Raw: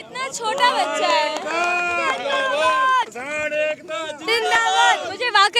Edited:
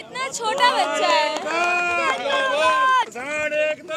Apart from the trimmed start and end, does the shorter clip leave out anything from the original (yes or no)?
no